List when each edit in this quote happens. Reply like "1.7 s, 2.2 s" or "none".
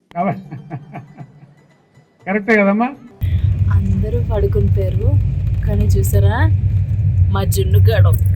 3.1 s